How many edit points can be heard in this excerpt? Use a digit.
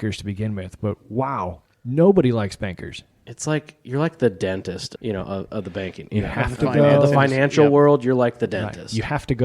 2